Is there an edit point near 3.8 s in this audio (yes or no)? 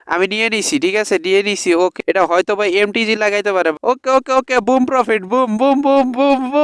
yes